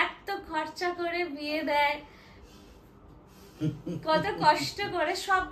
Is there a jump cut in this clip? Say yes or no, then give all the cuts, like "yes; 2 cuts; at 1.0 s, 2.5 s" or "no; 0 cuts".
no; 0 cuts